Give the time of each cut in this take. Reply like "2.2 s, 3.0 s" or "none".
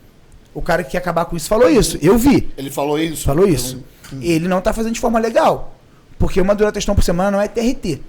none